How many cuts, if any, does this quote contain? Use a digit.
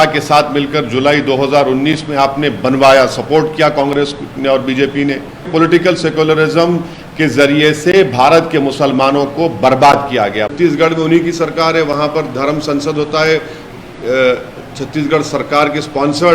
2